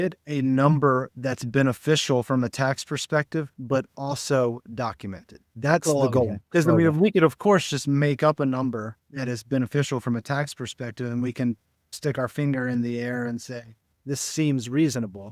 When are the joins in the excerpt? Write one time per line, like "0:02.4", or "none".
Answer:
none